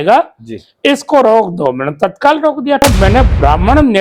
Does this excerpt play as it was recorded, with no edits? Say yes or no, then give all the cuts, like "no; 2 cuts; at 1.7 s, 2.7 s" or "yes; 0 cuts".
no; 1 cut; at 2.8 s